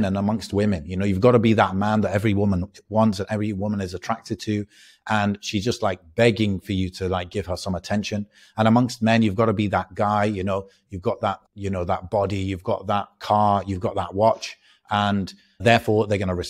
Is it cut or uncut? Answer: cut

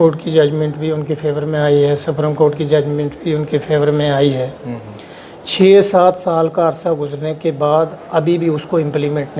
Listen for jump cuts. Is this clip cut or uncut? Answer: uncut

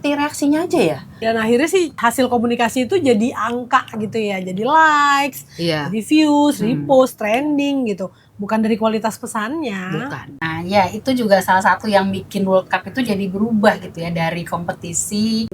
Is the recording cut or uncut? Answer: cut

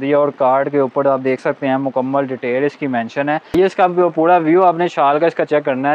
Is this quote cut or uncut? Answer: cut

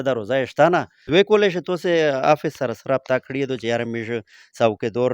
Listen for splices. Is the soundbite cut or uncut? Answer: cut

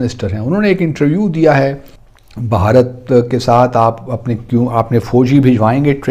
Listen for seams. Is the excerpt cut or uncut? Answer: cut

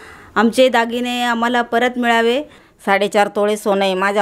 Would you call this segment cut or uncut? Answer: cut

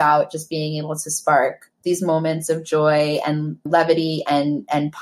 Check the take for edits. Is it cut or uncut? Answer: cut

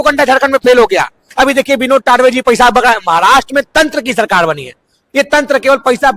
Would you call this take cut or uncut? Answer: cut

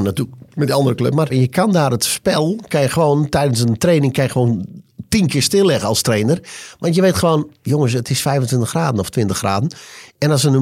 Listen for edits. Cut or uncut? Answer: cut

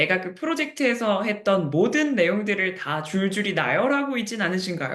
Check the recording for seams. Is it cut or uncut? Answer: uncut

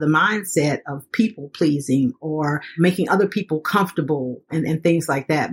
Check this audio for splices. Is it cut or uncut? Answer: cut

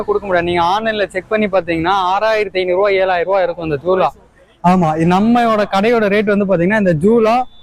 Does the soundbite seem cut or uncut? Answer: uncut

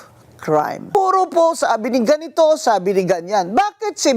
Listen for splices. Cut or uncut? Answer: cut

